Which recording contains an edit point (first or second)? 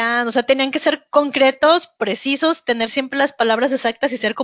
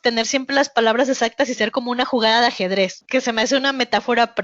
second